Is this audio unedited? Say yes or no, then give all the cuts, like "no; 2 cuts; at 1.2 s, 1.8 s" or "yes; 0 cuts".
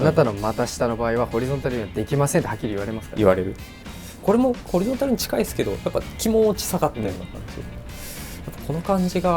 no; 1 cut; at 4.2 s